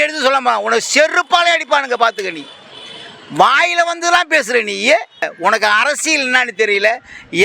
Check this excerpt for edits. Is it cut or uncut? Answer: cut